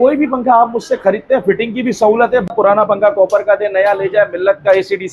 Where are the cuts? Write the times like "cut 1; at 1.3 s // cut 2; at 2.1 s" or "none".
cut 1; at 2.5 s

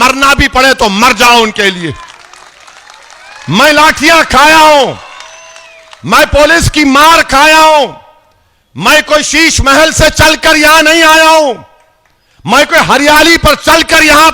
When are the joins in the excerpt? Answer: none

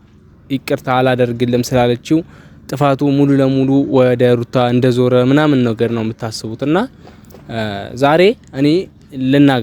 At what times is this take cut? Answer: none

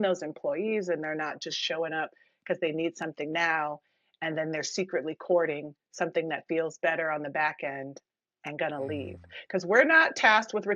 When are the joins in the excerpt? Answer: none

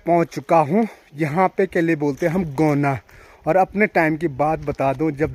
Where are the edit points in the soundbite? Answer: none

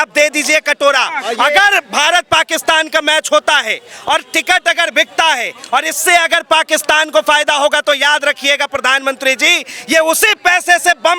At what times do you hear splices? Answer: none

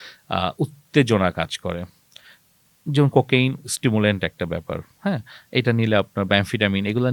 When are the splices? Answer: none

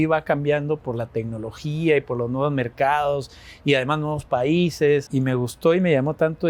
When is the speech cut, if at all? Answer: cut 1; at 5.1 s

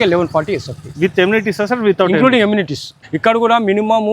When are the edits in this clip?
cut 1; at 2.9 s

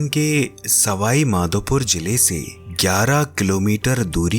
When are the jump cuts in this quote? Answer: cut 1; at 2.6 s

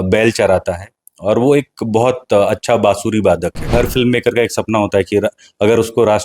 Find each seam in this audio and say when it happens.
cut 1; at 3.7 s

